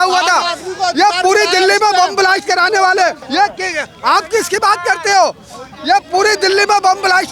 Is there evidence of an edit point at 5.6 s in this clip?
no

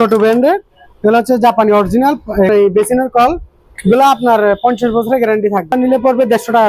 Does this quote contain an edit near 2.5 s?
yes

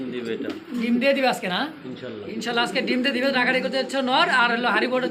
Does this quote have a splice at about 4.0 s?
no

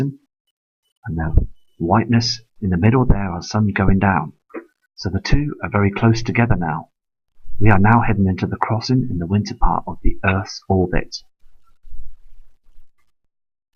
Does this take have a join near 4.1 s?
no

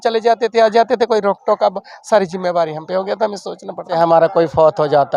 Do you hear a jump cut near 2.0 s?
no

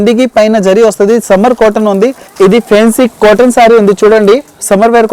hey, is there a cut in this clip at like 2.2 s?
yes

